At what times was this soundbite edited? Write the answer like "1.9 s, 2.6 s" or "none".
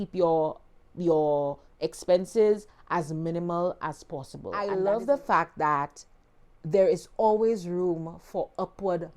4.6 s